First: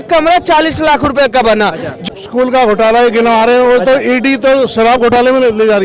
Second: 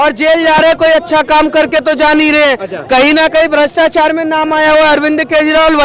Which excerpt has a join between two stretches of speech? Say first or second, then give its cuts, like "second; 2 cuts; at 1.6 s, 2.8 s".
first; 1 cut; at 1.9 s